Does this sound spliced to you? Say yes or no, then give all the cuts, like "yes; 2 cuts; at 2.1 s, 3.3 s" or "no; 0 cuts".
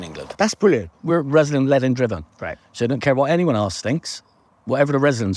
yes; 1 cut; at 0.9 s